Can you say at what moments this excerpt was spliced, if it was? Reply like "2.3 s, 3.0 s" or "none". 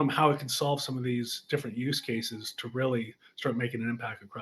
none